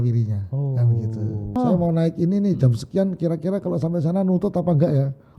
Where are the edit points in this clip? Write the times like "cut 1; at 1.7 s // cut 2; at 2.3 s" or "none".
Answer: cut 1; at 1.6 s